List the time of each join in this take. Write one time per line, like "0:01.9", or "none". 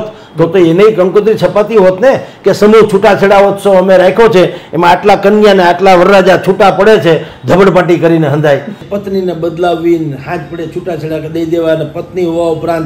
0:08.8